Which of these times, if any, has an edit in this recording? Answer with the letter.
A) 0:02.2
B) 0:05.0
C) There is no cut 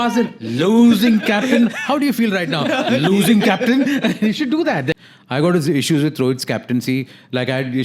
B